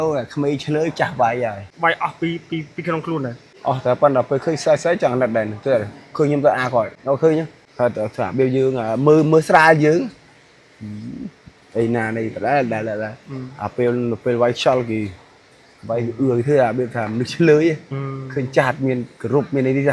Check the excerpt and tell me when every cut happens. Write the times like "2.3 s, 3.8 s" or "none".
1.6 s, 3.5 s, 7.0 s, 7.6 s